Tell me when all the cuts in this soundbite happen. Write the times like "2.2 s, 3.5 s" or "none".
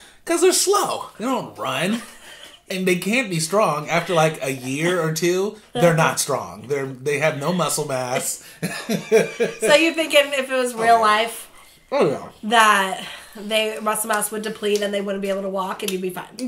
none

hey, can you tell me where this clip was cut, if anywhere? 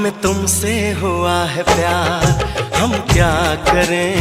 none

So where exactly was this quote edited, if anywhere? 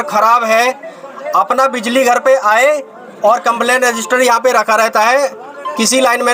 none

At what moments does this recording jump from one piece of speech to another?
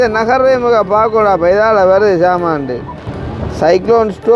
3.2 s

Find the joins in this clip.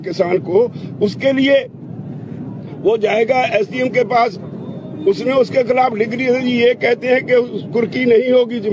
none

